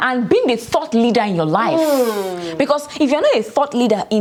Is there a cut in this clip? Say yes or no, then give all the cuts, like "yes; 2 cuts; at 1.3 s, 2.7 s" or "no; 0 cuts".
no; 0 cuts